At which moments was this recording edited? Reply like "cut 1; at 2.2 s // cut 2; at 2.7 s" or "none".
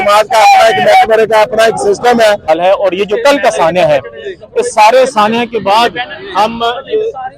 cut 1; at 2.5 s